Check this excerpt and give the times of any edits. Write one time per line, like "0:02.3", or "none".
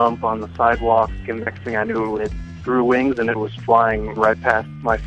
0:01.2
0:04.2